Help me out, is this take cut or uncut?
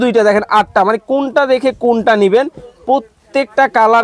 uncut